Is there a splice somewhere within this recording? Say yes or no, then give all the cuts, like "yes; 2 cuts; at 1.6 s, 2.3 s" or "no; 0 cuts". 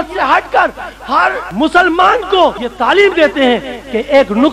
yes; 2 cuts; at 1.4 s, 2.7 s